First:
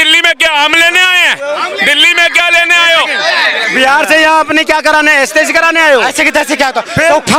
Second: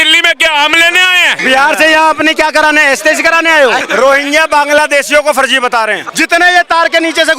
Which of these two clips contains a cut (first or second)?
second